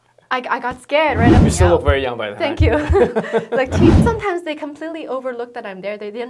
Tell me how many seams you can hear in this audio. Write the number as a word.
two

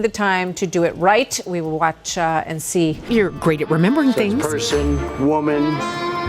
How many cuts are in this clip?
one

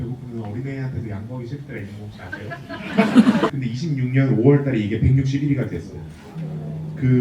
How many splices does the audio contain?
one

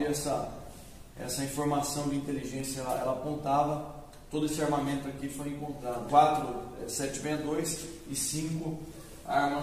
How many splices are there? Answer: zero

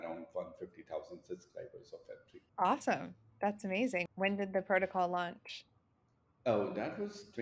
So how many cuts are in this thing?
two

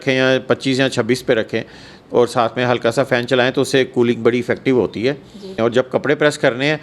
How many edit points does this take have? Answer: one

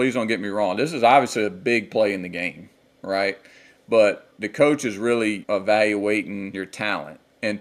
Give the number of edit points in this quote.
three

